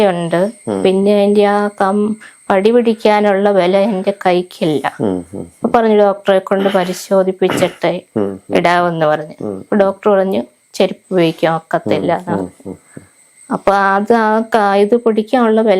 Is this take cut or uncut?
uncut